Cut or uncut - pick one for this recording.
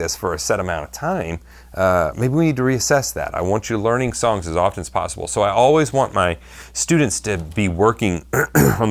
uncut